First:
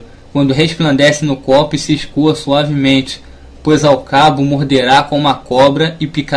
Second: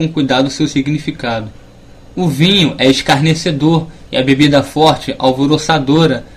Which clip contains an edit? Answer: second; 1 cut; at 4.1 s

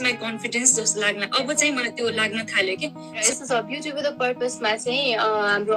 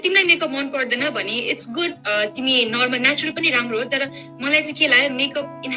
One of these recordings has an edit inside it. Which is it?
first; 1 cut; at 3.3 s

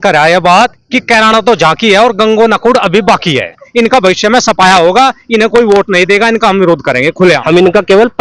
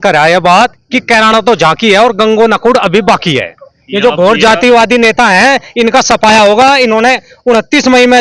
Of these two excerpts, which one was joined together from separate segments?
first; 2 cuts; at 3.6 s, 7.4 s

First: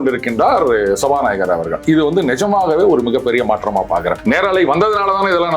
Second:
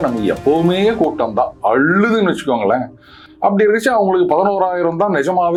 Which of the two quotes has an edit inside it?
first; 1 cut; at 4.2 s

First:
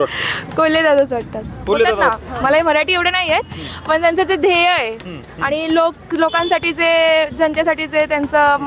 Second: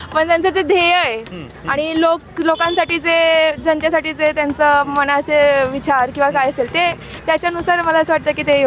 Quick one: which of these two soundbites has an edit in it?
first; 1 cut; at 2.1 s

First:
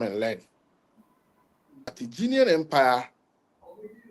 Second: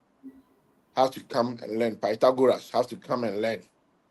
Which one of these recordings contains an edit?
first; 1 cut; at 1.9 s

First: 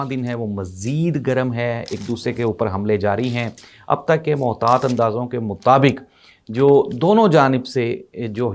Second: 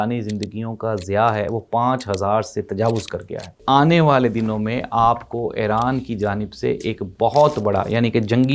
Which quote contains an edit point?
second; 1 cut; at 3.6 s

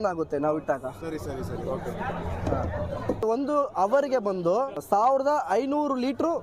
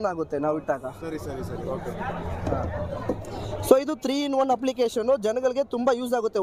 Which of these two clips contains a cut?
first; 2 cuts; at 3.2 s, 4.8 s

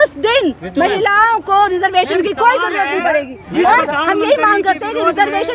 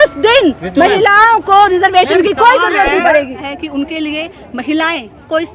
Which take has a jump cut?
second; 1 cut; at 3.4 s

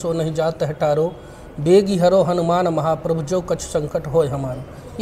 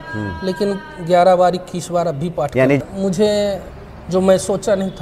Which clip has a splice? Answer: second; 1 cut; at 2.8 s

